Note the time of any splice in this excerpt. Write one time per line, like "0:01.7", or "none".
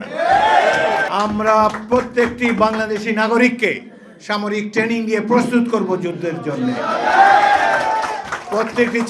0:01.1